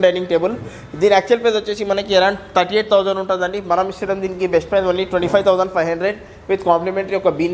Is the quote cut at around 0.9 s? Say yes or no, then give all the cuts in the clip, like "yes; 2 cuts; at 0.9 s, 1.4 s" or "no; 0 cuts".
no; 0 cuts